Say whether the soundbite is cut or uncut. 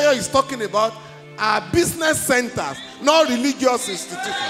uncut